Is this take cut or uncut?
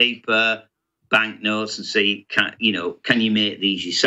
uncut